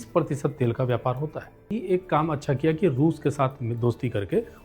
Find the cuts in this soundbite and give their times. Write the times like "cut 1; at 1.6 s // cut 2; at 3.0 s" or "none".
cut 1; at 1.8 s